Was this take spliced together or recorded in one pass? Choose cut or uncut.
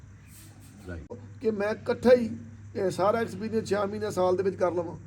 cut